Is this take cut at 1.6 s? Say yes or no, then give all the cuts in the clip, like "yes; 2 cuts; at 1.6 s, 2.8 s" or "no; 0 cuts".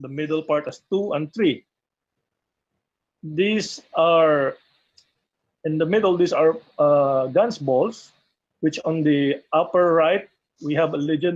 no; 1 cut; at 4.0 s